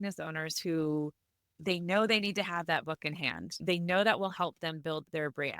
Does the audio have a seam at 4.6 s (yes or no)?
no